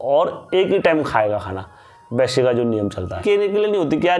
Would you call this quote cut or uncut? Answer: cut